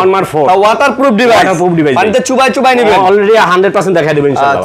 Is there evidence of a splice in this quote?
no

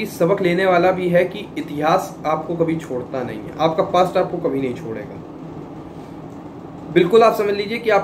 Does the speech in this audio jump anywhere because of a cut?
no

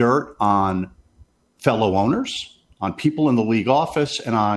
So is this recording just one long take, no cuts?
yes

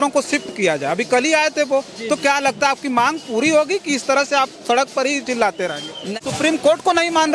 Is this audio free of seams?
no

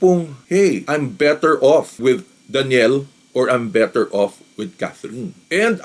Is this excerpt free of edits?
yes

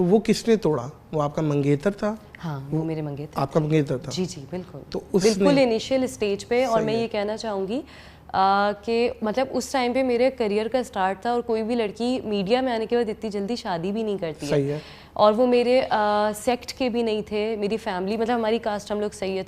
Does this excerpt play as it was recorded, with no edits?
yes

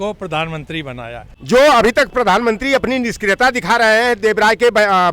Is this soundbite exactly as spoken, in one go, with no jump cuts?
no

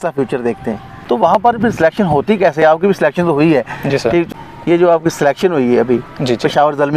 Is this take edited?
yes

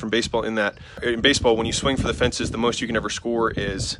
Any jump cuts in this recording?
yes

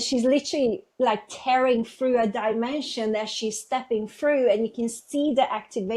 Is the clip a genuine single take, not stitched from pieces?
yes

